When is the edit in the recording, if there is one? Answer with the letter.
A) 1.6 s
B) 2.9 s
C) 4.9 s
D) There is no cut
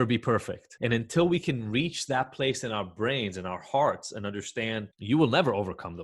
C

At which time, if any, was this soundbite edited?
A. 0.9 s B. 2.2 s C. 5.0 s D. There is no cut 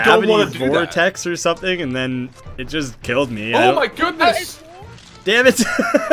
C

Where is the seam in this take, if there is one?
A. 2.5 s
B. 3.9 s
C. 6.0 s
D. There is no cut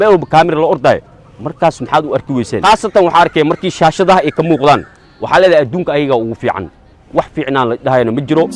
A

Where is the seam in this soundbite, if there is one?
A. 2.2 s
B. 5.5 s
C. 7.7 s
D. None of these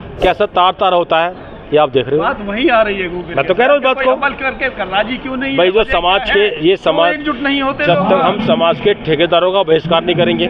D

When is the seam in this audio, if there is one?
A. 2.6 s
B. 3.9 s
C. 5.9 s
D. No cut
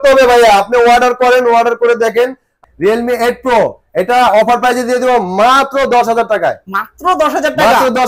A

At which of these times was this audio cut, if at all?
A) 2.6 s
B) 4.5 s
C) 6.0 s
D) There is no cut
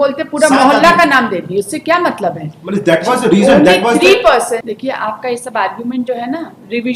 B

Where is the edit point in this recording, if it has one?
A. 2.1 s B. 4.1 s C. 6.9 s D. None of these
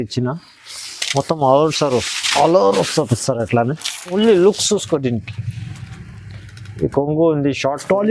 B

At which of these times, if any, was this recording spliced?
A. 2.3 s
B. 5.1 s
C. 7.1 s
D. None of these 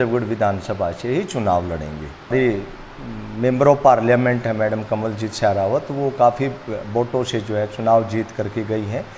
A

